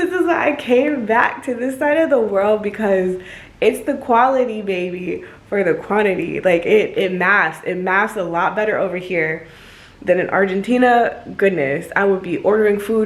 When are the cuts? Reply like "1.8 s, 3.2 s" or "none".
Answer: none